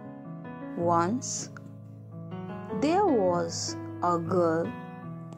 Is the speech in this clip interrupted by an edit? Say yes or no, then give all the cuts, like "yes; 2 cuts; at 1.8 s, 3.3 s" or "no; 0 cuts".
yes; 3 cuts; at 0.8 s, 1.4 s, 2.8 s